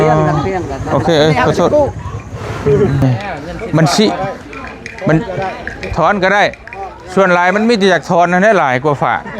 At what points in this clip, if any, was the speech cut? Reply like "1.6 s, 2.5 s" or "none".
3.0 s